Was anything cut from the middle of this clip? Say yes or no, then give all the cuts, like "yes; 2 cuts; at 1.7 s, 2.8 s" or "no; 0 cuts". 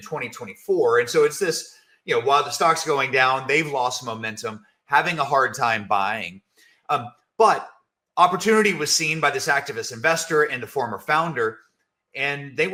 no; 0 cuts